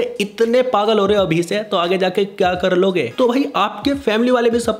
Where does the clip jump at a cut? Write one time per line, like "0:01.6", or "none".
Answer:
0:03.1